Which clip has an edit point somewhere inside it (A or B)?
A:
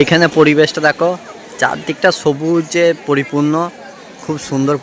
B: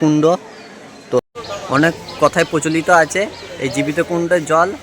B